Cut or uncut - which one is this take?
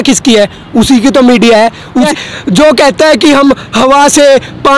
cut